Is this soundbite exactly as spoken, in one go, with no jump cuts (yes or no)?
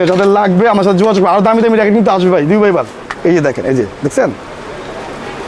no